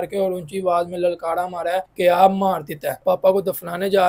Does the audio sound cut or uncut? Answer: cut